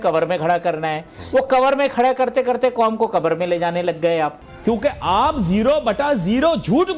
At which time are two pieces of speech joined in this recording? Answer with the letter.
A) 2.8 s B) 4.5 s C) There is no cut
B